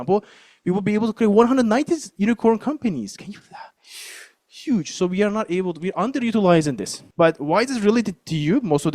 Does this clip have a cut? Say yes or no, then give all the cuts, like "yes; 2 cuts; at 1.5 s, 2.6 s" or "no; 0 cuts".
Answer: yes; 1 cut; at 7.0 s